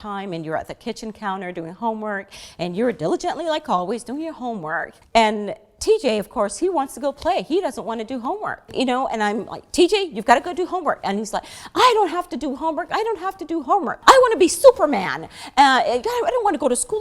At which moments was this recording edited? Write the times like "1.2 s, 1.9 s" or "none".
5.0 s, 8.7 s, 13.9 s